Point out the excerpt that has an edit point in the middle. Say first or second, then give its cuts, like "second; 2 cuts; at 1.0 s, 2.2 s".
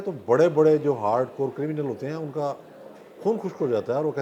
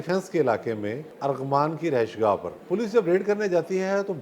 second; 2 cuts; at 1.1 s, 2.5 s